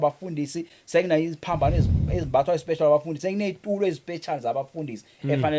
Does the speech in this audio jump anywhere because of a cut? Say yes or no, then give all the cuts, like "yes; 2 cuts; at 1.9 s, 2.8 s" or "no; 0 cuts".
no; 0 cuts